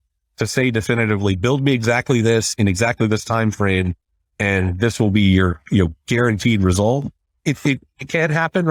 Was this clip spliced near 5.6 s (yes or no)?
no